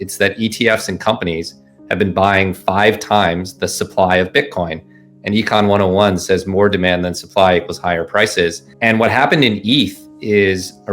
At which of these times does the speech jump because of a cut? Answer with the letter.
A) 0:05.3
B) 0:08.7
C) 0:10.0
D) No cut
B